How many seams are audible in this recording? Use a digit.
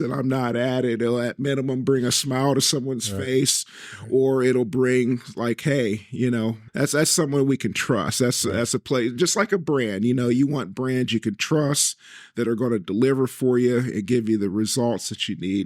1